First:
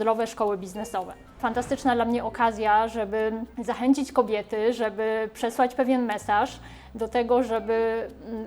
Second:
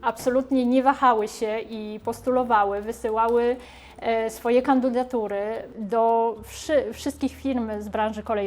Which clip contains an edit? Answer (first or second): first